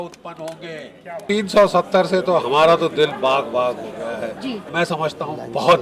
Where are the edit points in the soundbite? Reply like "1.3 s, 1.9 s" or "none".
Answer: 1.2 s, 4.7 s